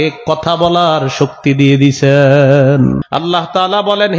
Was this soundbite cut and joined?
yes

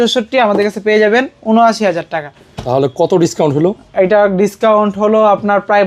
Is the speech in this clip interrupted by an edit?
no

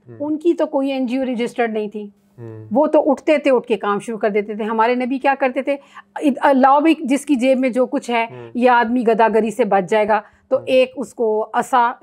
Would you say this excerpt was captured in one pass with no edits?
yes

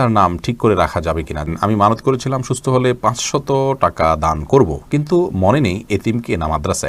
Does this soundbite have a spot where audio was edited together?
yes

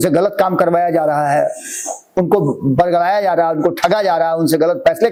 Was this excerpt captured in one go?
yes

